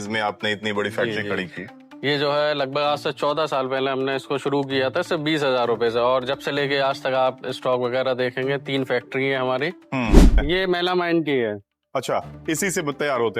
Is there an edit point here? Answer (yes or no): yes